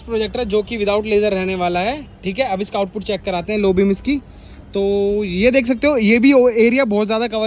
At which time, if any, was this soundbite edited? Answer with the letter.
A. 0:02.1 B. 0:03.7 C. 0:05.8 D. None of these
D